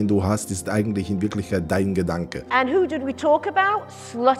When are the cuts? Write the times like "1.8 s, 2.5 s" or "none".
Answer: 2.4 s